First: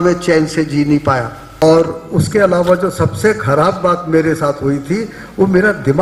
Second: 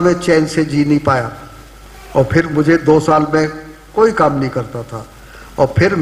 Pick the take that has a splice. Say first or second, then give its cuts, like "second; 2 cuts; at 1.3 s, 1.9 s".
first; 1 cut; at 1.4 s